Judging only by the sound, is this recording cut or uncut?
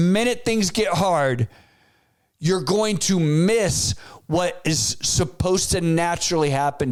uncut